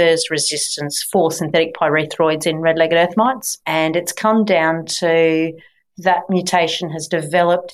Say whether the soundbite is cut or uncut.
uncut